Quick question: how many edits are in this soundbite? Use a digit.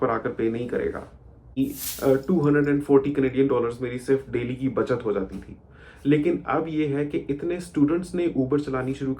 1